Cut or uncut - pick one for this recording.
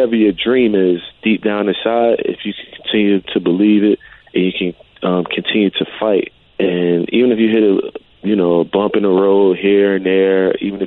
cut